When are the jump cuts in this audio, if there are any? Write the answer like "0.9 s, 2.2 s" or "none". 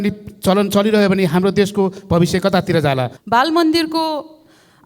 3.2 s